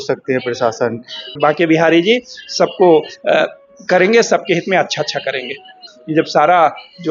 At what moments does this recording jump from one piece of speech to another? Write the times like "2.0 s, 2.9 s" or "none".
1.4 s, 5.9 s